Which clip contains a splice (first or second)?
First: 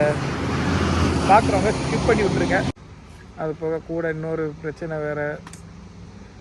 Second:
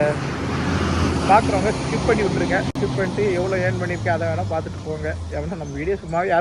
first